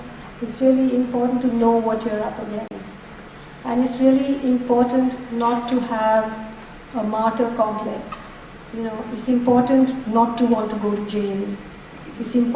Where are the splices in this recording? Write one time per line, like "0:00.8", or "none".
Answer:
none